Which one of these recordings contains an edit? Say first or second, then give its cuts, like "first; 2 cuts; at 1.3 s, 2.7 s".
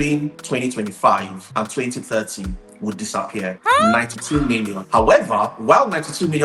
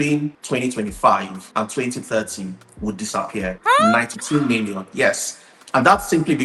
first; 1 cut; at 4.8 s